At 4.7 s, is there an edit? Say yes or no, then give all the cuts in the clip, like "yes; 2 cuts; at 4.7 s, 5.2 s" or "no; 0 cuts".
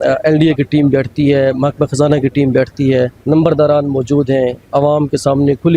no; 1 cut; at 3.2 s